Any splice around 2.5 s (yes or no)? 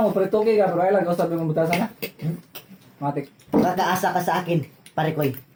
no